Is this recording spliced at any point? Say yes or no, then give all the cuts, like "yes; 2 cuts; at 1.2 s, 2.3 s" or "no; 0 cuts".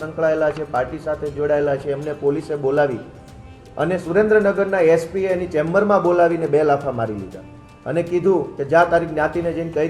no; 0 cuts